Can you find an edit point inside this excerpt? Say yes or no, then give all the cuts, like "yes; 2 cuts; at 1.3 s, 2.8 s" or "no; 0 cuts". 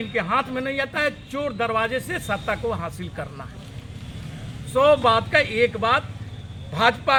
no; 0 cuts